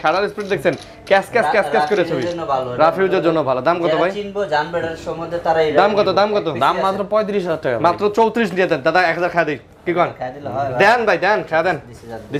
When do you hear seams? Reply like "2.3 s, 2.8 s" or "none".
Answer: none

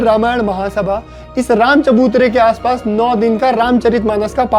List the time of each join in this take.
none

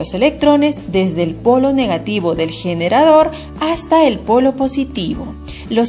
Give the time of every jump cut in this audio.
none

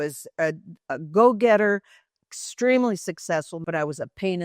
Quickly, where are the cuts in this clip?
3.5 s

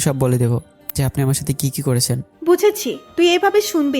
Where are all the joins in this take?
2.3 s

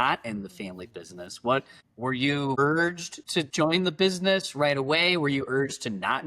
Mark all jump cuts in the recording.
3.3 s

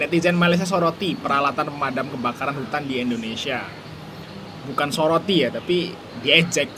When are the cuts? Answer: none

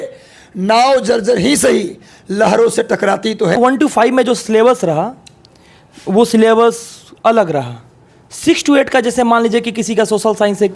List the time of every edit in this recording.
3.5 s

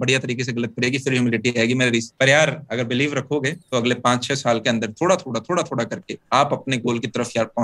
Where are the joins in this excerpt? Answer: 2.1 s

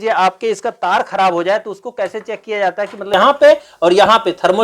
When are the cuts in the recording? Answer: 3.1 s

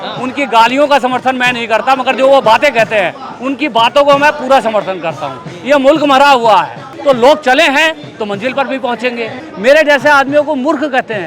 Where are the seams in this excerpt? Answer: 6.8 s, 9.4 s

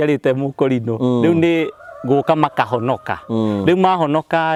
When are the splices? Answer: none

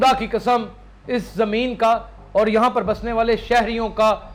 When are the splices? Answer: none

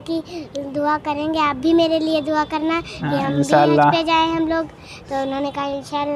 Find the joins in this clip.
none

